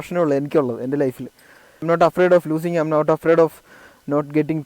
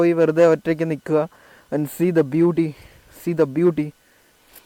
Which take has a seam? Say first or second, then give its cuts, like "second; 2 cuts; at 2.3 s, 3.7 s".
first; 1 cut; at 1.7 s